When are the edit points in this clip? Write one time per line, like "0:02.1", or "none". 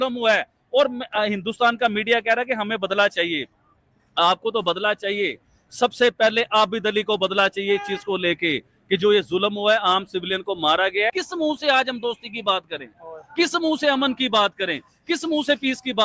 0:11.2